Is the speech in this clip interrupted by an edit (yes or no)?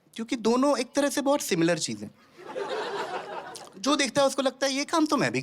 yes